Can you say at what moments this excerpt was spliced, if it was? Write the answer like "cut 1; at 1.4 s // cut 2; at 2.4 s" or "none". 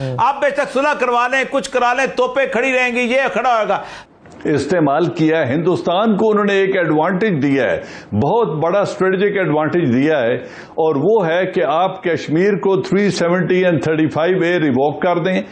cut 1; at 3.9 s